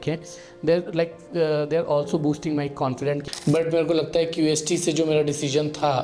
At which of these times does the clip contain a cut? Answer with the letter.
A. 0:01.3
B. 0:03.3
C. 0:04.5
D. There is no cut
B